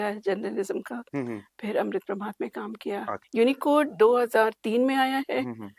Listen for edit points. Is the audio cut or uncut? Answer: cut